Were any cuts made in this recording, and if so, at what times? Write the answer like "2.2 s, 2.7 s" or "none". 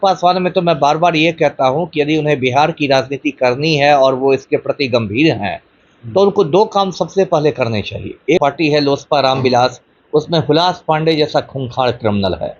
8.4 s